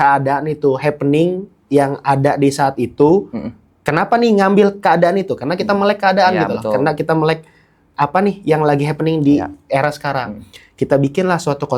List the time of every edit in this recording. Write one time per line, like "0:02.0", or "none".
none